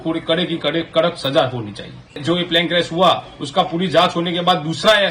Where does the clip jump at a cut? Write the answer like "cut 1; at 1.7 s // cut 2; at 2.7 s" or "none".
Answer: none